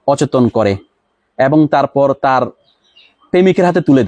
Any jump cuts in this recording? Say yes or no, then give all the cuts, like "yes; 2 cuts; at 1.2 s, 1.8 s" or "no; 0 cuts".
no; 0 cuts